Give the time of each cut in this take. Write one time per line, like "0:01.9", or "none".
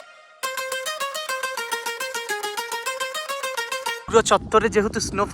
0:04.0